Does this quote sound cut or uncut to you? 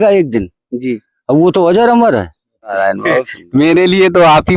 cut